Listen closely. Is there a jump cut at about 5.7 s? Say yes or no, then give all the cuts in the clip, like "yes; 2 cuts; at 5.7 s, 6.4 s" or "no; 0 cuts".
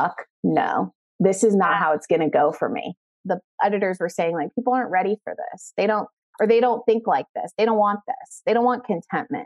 no; 1 cut; at 3.1 s